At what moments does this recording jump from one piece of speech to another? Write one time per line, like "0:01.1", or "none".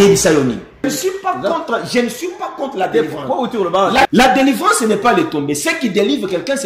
0:00.9
0:04.1